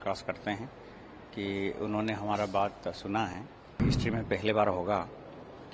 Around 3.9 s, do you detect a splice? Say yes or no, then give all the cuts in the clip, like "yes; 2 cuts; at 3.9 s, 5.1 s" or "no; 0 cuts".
yes; 1 cut; at 3.9 s